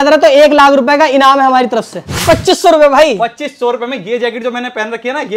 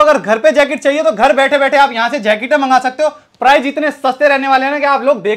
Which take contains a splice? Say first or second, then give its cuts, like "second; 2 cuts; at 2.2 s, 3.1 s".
first; 1 cut; at 2.2 s